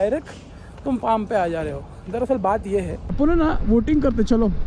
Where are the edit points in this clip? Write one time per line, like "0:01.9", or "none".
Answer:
0:03.2